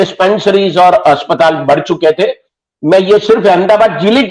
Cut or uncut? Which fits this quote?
uncut